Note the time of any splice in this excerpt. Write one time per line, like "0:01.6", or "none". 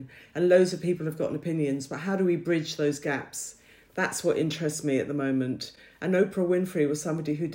none